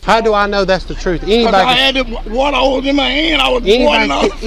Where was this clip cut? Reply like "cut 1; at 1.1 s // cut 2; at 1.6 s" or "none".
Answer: none